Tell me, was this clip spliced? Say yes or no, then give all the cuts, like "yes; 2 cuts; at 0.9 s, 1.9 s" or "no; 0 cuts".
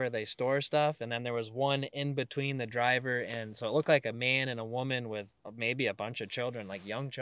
no; 0 cuts